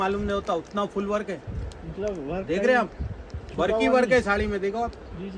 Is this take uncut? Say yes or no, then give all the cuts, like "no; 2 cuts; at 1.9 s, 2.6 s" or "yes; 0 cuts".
yes; 0 cuts